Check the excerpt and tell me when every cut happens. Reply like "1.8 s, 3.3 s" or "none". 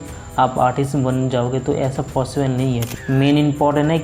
2.9 s